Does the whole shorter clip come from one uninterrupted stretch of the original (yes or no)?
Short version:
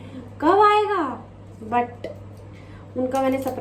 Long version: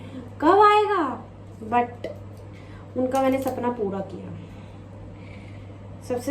yes